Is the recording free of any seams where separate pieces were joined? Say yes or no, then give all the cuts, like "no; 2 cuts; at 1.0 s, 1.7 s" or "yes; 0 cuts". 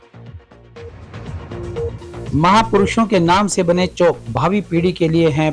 no; 1 cut; at 2.3 s